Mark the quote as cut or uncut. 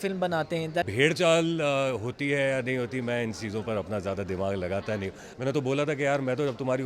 cut